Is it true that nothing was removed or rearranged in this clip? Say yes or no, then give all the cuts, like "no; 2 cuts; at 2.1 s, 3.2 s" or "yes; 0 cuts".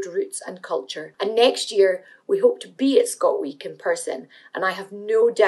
no; 1 cut; at 1.0 s